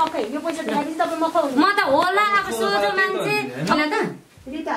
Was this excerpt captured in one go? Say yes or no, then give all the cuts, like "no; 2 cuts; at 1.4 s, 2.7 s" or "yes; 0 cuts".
no; 1 cut; at 3.8 s